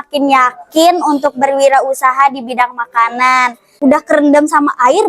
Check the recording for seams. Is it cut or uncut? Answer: cut